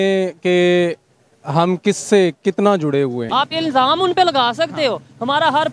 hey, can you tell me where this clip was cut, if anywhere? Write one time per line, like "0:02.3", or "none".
0:03.3